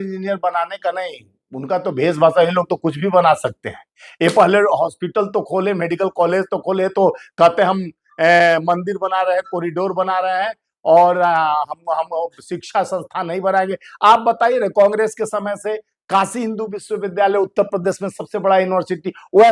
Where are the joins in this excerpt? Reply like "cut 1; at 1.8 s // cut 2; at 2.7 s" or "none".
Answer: none